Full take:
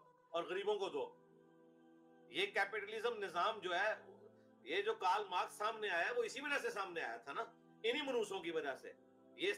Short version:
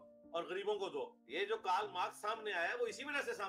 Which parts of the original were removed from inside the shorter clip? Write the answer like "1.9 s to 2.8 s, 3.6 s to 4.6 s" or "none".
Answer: 1.2 s to 4.6 s